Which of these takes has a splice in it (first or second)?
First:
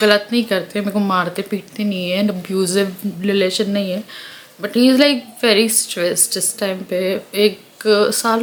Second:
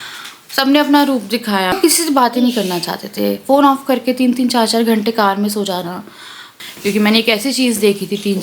second